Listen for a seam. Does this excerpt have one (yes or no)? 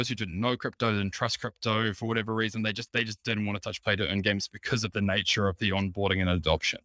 no